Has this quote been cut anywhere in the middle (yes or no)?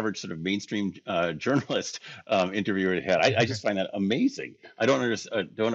no